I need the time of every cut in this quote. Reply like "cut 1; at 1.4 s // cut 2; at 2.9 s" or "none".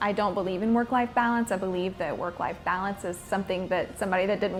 none